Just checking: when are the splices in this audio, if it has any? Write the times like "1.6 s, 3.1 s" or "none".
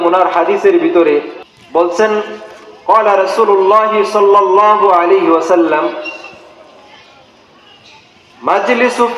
1.0 s